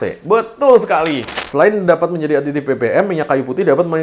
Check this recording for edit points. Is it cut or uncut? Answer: cut